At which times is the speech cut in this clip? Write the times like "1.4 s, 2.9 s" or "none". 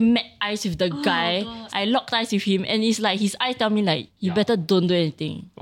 1.6 s, 4.1 s